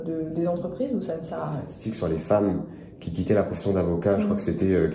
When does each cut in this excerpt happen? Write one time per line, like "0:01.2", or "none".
0:01.8